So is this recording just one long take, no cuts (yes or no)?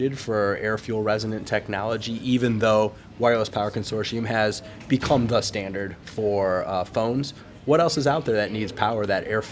yes